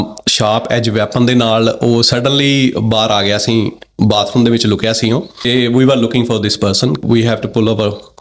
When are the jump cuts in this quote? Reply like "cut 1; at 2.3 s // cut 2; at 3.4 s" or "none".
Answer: cut 1; at 5.5 s // cut 2; at 7.0 s